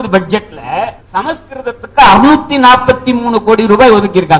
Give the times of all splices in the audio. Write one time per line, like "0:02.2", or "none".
0:01.0